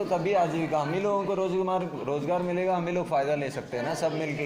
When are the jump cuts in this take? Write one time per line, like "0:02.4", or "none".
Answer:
none